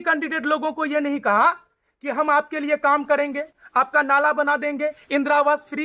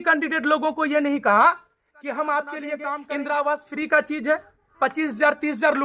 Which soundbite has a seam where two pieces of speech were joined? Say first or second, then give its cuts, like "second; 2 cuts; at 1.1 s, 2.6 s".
second; 1 cut; at 2.9 s